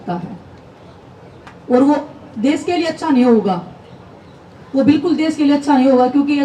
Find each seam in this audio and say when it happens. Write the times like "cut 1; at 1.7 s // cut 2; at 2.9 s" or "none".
none